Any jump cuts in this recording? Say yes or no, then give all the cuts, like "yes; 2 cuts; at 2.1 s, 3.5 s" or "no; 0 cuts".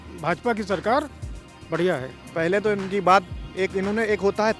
yes; 1 cut; at 2.2 s